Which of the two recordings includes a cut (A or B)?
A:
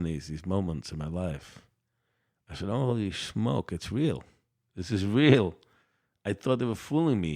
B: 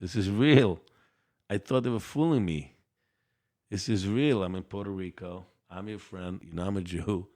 B